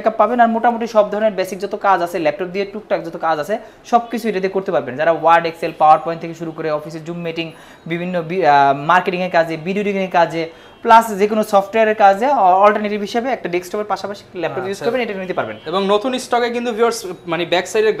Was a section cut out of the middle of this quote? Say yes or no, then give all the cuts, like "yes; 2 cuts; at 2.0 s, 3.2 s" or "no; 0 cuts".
no; 0 cuts